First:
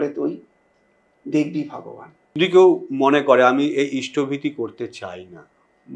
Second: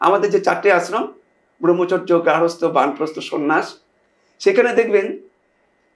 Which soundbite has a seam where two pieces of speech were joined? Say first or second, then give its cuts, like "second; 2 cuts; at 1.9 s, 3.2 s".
first; 1 cut; at 2.4 s